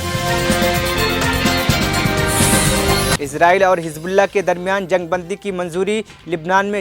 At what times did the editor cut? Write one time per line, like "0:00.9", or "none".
0:03.2